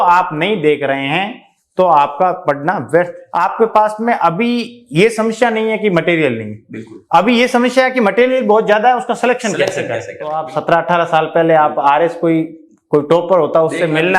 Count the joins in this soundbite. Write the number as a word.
two